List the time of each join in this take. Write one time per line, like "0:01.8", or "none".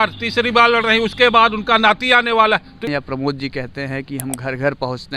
0:02.9